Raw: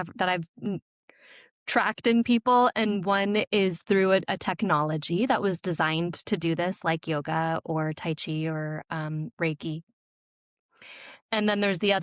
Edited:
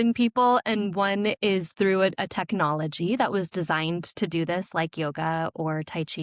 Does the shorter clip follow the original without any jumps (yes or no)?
yes